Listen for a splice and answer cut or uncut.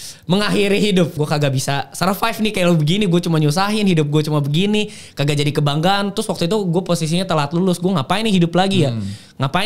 cut